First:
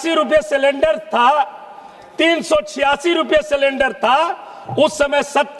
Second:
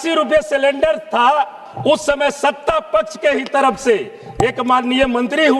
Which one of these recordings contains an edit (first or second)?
second